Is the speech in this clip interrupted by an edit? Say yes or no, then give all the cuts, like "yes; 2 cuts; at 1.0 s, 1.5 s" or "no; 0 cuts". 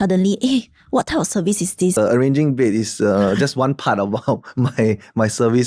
yes; 1 cut; at 1.9 s